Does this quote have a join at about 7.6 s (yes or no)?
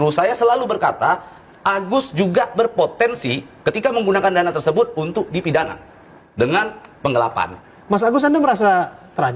yes